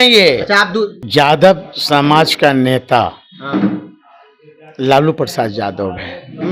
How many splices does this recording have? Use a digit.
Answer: 1